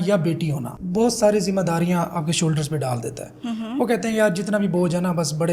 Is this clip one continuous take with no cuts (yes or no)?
yes